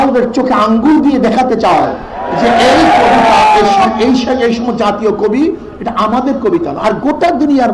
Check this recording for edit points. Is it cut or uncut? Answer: uncut